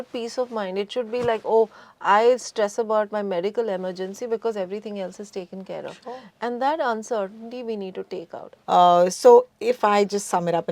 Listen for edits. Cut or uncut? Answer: cut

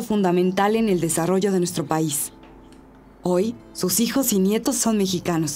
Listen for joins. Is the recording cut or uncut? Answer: uncut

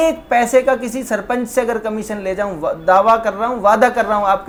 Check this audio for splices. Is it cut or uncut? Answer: uncut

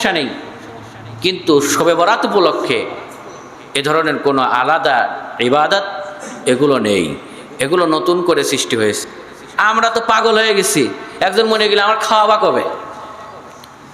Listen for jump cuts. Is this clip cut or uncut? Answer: cut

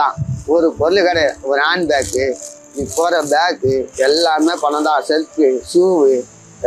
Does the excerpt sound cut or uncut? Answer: uncut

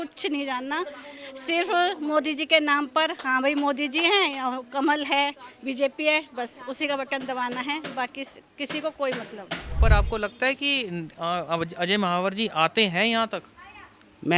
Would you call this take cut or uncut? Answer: cut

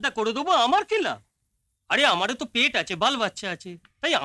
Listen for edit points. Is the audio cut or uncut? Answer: uncut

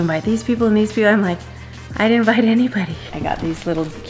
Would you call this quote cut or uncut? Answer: cut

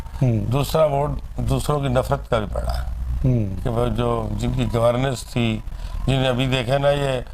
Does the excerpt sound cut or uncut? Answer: uncut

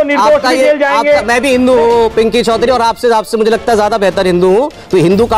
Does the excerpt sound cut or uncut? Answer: uncut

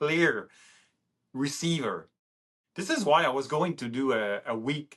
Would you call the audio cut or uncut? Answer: cut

